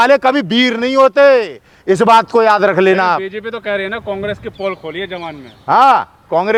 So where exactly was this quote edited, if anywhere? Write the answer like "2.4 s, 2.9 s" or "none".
none